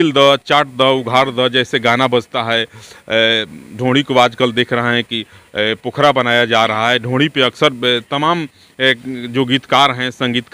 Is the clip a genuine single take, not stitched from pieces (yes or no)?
yes